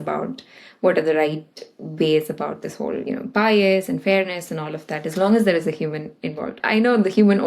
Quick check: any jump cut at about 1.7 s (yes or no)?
no